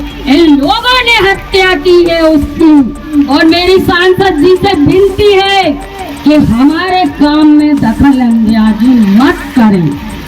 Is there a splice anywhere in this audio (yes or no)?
no